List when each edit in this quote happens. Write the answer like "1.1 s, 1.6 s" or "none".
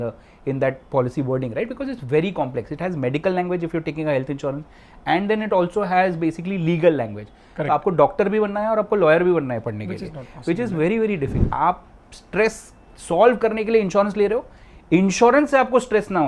11.4 s